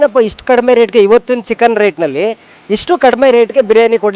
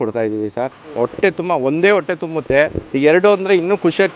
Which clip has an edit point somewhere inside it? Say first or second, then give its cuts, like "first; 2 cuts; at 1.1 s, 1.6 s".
second; 1 cut; at 2.8 s